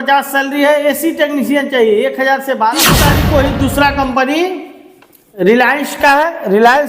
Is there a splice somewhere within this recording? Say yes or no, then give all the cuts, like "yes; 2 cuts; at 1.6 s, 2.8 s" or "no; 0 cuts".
yes; 1 cut; at 3.1 s